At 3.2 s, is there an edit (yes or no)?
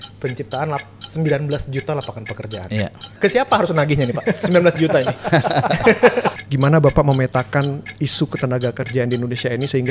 yes